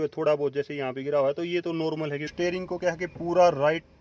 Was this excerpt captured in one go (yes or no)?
no